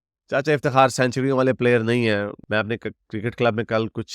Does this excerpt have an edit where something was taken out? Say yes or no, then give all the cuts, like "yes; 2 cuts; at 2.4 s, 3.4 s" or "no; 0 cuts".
yes; 1 cut; at 2.4 s